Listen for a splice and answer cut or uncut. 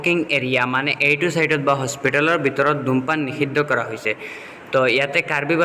uncut